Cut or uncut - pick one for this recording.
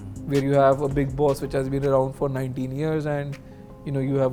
uncut